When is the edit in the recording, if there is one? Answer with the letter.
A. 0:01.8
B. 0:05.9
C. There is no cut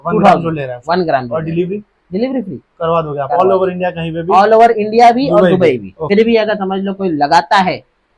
B